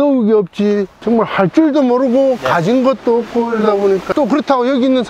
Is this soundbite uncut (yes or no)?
yes